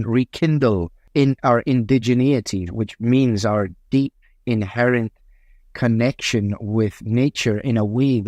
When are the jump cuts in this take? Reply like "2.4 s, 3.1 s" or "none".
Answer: 1.0 s, 2.6 s

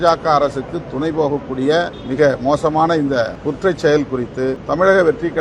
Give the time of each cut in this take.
2.0 s, 3.4 s, 4.6 s

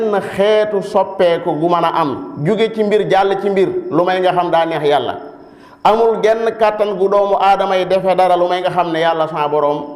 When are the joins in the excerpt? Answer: none

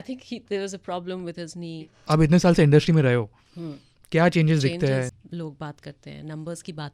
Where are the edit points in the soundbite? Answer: 1.9 s, 5.2 s

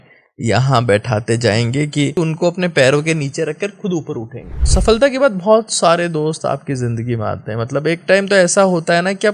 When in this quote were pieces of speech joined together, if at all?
2.2 s, 4.6 s

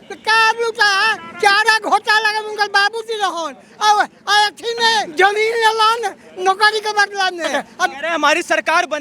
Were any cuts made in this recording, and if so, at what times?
1.2 s, 5.1 s, 8.0 s

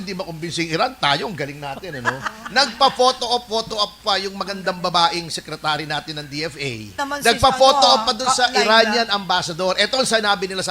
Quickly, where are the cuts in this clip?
7.1 s

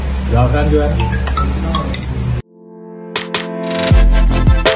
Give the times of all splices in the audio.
2.4 s

